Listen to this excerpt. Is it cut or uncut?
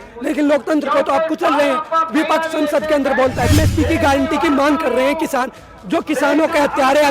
cut